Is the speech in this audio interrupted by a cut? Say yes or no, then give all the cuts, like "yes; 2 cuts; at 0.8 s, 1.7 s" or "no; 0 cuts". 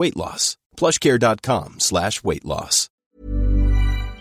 yes; 1 cut; at 3.0 s